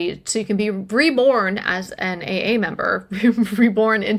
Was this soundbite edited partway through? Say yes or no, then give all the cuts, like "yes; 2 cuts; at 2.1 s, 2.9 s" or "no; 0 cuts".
no; 0 cuts